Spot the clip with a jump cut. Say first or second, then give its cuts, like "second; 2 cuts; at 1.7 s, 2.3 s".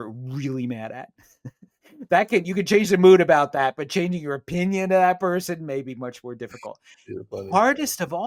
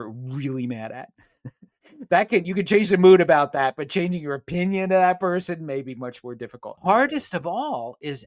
second; 1 cut; at 6.8 s